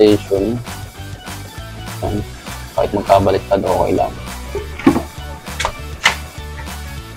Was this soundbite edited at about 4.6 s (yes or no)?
no